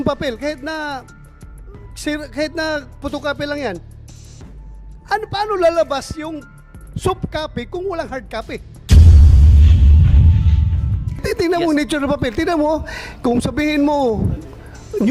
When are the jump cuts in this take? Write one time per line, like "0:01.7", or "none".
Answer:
0:08.7